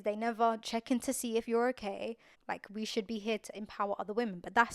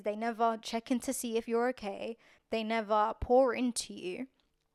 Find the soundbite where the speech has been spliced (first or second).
first